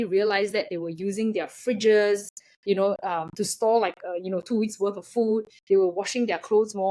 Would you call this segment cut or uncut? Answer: uncut